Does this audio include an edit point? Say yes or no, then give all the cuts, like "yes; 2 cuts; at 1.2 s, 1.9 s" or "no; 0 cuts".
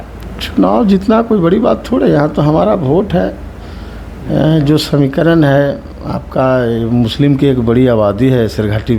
no; 0 cuts